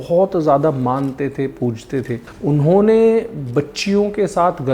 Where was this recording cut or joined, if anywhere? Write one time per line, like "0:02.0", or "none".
0:02.3